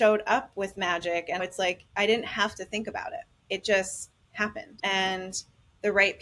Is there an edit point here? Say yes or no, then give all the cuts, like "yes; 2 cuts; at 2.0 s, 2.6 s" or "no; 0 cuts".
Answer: yes; 3 cuts; at 1.4 s, 3.3 s, 4.7 s